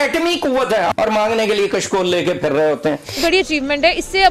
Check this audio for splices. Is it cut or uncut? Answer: cut